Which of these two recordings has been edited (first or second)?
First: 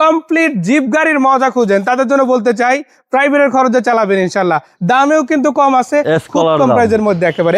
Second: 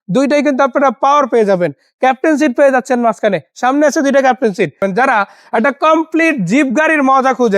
second